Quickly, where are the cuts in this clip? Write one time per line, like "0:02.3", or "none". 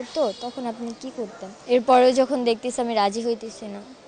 0:01.5